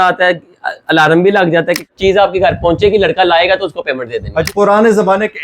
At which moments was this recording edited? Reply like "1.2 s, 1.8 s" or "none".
1.9 s, 4.5 s